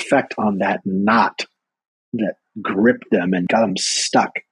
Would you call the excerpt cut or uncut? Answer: cut